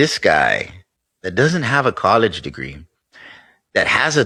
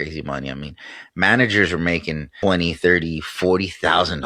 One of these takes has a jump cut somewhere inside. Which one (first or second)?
second